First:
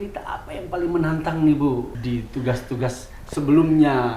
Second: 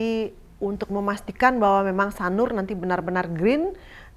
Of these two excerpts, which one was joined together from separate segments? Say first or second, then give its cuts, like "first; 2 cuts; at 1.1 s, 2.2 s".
first; 1 cut; at 2.0 s